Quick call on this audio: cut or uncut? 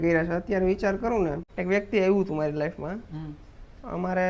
cut